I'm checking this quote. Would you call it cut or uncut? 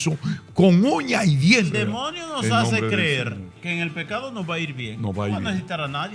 cut